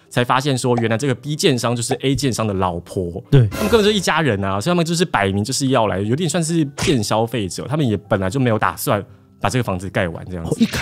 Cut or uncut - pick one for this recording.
uncut